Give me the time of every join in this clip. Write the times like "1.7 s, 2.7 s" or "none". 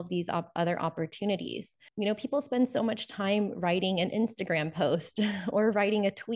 1.8 s